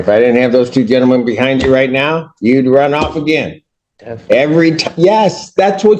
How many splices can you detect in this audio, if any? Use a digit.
0